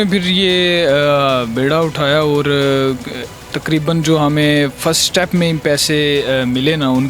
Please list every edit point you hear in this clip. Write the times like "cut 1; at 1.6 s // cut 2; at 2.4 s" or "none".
none